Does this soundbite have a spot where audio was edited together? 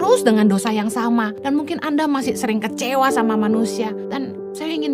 yes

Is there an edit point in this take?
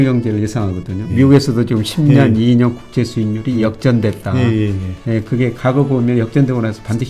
yes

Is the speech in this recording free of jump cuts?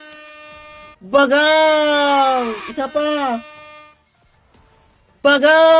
no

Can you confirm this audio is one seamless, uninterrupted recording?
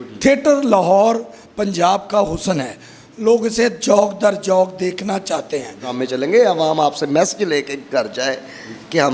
no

